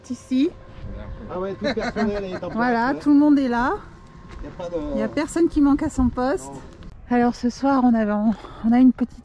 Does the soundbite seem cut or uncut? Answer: cut